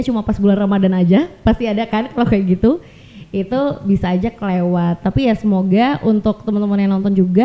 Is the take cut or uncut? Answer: uncut